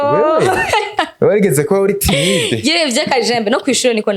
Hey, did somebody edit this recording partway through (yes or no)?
no